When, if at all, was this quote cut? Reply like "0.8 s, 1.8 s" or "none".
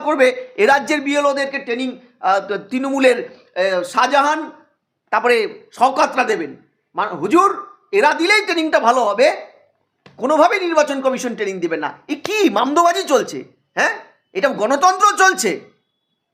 none